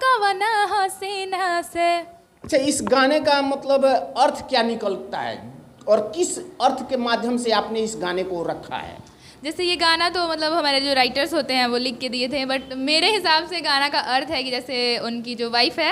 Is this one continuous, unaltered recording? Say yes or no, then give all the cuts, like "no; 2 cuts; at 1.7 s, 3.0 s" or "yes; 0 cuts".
yes; 0 cuts